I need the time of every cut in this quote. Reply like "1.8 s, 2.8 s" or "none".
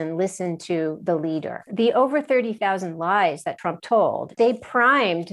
1.6 s, 4.2 s